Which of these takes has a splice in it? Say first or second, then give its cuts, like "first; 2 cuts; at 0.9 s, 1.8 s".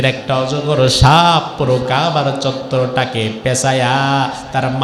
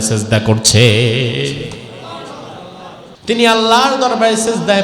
second; 1 cut; at 3.1 s